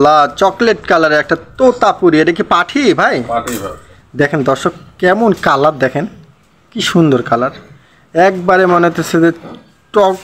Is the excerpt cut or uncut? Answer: uncut